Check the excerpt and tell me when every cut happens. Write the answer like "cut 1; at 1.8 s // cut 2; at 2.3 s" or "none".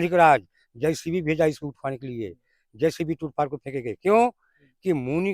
none